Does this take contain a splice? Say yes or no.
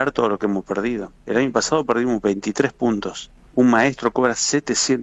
yes